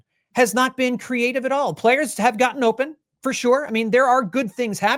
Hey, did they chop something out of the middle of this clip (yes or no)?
no